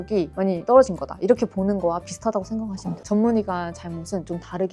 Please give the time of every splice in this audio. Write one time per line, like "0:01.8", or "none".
0:03.0